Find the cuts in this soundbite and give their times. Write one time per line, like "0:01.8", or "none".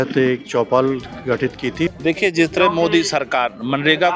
0:01.9